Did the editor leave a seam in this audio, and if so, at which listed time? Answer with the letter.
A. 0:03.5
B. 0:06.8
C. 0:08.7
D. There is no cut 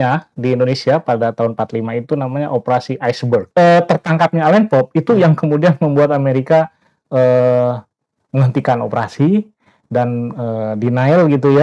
A